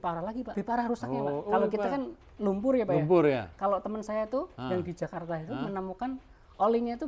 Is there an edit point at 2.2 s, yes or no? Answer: no